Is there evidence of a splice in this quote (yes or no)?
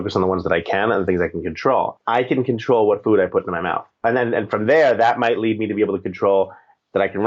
yes